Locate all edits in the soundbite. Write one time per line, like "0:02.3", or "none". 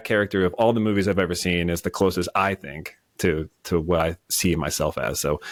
none